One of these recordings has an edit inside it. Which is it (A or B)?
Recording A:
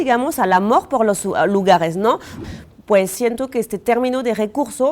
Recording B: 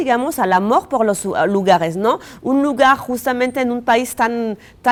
A